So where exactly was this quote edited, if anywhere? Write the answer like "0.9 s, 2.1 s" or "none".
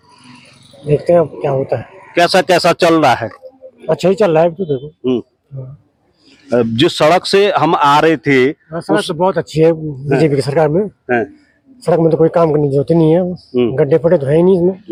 none